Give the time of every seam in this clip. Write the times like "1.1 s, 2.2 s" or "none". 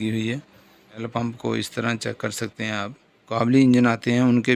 1.0 s, 3.3 s